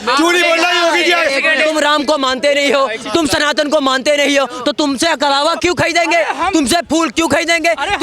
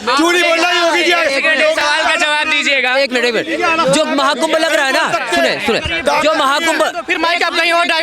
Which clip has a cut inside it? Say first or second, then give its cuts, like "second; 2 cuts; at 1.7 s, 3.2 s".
first; 1 cut; at 1.7 s